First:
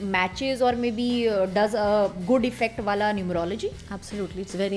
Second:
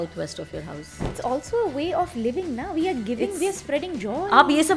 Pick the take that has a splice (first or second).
second